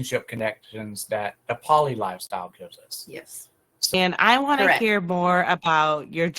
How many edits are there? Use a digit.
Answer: 1